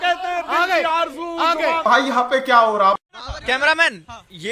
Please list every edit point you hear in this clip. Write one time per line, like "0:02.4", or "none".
0:01.8
0:03.4